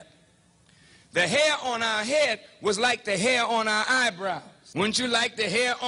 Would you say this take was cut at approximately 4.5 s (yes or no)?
yes